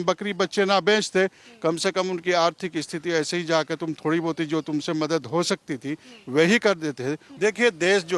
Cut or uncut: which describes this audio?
cut